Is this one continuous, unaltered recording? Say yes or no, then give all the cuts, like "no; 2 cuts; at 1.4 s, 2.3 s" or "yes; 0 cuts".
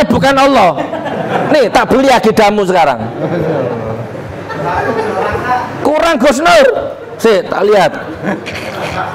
yes; 0 cuts